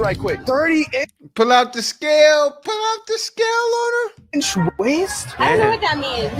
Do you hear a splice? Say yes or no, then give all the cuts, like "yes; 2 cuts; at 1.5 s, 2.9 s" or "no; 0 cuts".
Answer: no; 0 cuts